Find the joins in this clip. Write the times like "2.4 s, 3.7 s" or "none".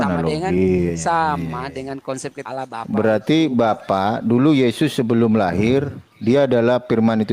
2.4 s